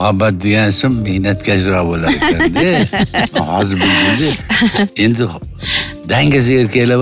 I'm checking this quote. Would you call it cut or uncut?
uncut